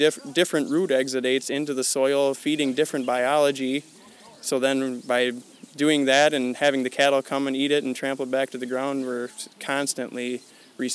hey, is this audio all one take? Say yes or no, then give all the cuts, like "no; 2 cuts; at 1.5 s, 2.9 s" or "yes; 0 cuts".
yes; 0 cuts